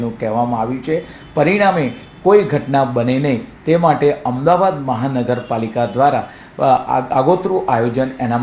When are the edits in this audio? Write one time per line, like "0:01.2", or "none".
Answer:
none